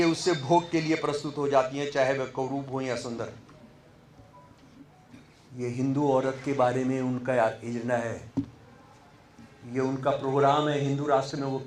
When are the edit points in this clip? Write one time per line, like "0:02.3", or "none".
none